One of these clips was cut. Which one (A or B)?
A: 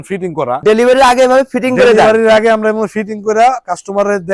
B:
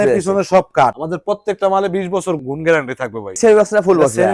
B